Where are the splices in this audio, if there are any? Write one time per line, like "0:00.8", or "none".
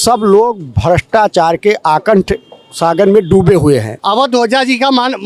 0:04.0

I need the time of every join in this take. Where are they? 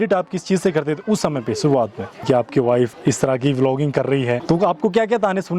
0:02.2
0:02.9
0:04.4

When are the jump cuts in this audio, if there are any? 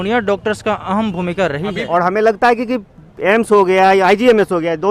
0:01.8

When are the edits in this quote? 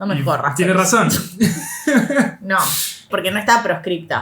0:03.1

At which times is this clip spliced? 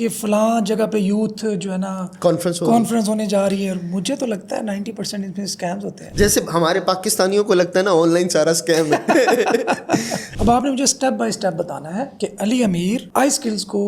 0:06.0
0:10.2

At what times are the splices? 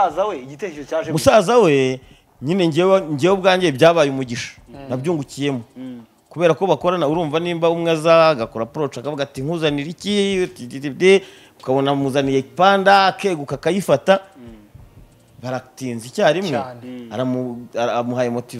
none

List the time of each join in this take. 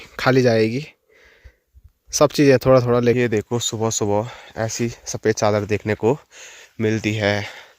0:03.2

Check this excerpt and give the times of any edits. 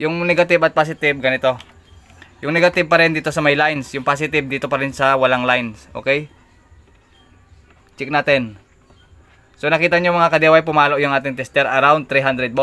none

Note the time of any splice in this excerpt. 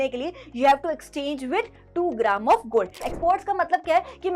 0:03.0

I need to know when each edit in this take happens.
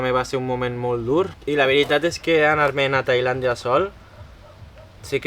0:01.4

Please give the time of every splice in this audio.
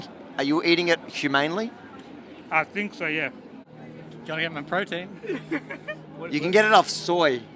0:03.5

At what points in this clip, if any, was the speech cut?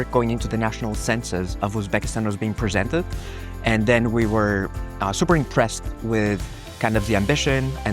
none

